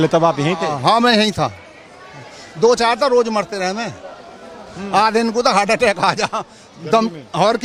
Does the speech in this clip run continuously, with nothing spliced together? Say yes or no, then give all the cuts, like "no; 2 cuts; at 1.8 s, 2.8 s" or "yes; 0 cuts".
yes; 0 cuts